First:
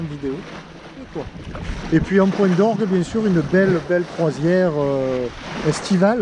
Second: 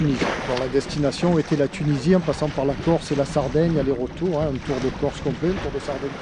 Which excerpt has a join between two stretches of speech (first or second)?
first